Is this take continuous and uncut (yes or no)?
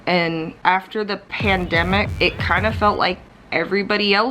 no